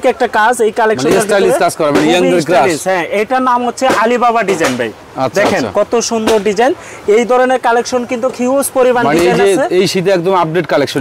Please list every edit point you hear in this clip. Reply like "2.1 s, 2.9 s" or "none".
none